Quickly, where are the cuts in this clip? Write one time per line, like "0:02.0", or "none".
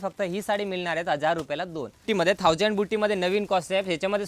0:02.0